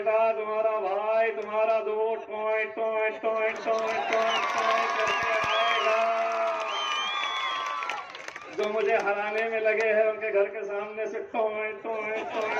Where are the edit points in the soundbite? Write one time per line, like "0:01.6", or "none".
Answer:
none